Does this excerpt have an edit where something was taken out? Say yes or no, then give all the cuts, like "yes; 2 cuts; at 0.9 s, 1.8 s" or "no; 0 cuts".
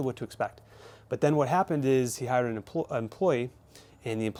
no; 0 cuts